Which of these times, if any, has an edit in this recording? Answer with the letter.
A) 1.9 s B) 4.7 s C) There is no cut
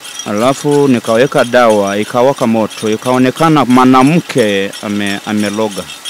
C